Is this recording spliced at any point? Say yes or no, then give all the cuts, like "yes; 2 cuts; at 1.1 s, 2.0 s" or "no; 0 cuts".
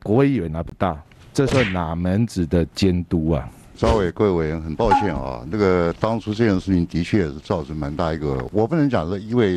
yes; 3 cuts; at 1.1 s, 3.8 s, 8.5 s